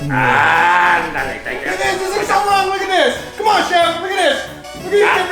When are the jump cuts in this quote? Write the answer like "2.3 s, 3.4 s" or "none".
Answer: 1.5 s